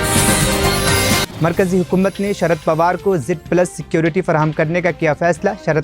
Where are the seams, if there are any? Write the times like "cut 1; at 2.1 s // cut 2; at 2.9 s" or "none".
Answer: cut 1; at 1.2 s